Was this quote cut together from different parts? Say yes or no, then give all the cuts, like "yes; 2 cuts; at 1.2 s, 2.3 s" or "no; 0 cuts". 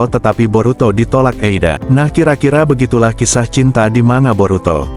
yes; 1 cut; at 1.8 s